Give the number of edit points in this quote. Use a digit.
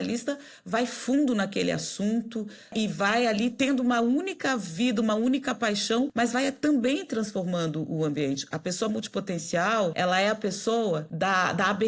4